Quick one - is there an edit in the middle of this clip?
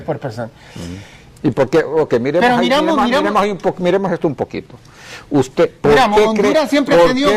no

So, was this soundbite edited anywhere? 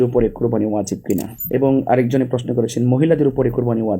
yes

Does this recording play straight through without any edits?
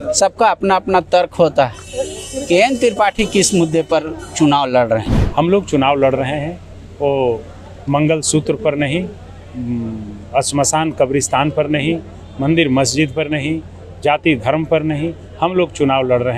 no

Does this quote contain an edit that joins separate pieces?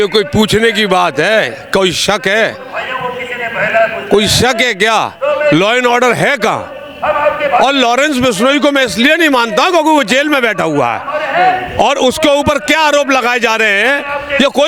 no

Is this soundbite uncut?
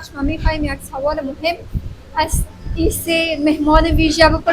yes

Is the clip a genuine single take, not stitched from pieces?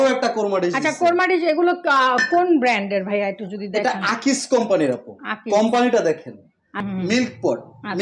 no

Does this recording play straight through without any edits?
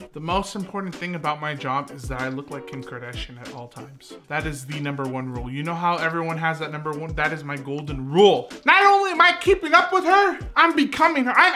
yes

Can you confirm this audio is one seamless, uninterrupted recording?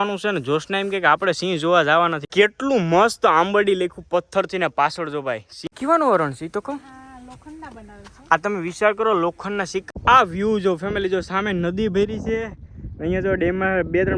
no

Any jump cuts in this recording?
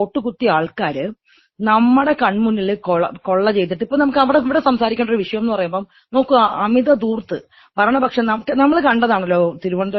no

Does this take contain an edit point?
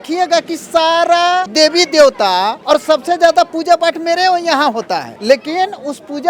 yes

